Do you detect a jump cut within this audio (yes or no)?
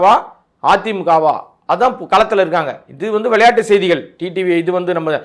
no